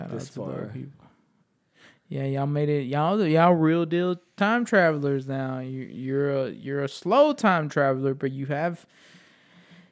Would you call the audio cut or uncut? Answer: uncut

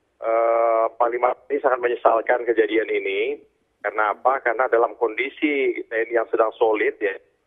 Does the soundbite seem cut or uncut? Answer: cut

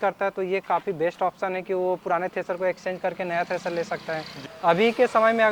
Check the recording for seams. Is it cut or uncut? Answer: cut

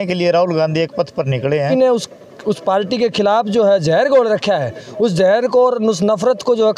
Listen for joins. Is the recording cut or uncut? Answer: cut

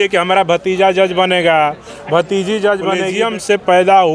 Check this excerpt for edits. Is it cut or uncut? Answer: cut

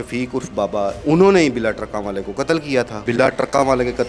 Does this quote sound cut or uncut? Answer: cut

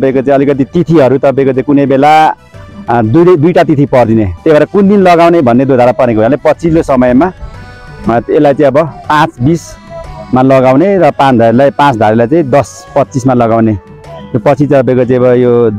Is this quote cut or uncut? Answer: uncut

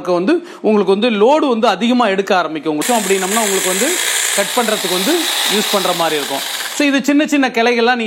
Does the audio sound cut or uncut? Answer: cut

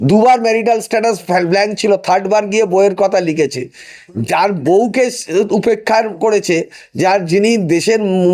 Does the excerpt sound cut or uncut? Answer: uncut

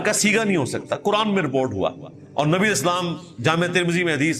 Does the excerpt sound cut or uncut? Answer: uncut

